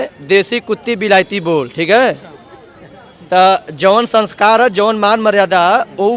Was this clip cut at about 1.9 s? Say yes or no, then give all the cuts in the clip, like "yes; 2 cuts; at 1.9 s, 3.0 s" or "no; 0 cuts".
no; 0 cuts